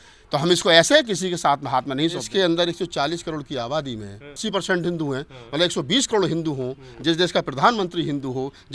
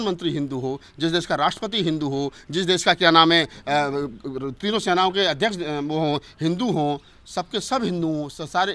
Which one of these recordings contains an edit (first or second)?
first